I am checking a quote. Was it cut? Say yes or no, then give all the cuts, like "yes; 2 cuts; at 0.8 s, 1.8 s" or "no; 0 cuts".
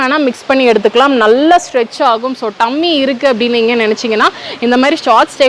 no; 0 cuts